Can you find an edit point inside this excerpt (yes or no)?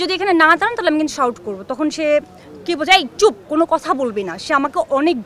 no